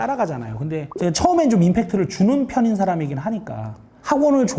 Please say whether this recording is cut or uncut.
uncut